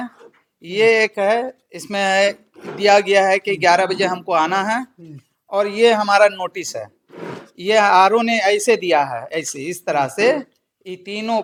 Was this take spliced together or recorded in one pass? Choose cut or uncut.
uncut